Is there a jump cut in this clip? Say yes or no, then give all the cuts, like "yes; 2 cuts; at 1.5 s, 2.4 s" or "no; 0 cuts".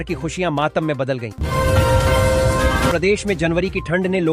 no; 0 cuts